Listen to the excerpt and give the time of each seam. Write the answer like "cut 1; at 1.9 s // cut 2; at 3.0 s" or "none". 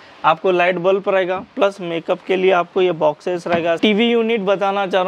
cut 1; at 3.8 s